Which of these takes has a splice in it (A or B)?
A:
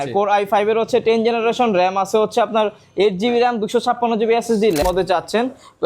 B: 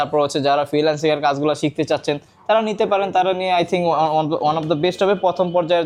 A